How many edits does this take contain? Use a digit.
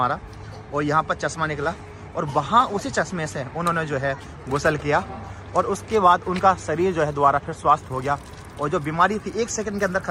0